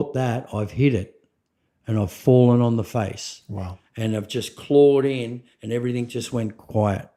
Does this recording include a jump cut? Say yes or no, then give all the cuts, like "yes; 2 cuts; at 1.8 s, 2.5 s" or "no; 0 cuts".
no; 0 cuts